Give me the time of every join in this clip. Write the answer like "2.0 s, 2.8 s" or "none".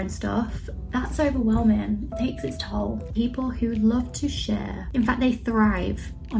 3.1 s, 4.8 s